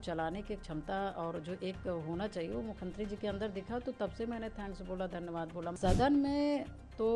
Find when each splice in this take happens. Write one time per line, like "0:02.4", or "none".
0:05.8